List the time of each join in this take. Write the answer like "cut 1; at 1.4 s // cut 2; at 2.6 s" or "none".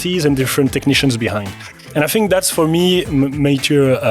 cut 1; at 3.1 s